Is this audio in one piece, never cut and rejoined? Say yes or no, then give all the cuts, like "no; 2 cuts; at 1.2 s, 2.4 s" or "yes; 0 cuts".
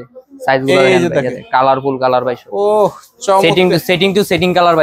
yes; 0 cuts